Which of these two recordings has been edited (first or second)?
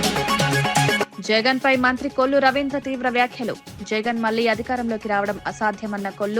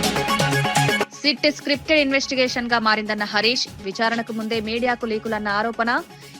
second